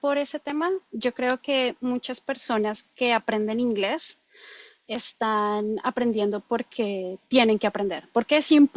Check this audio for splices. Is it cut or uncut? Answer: uncut